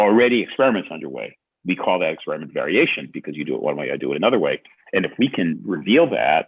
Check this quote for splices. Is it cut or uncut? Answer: uncut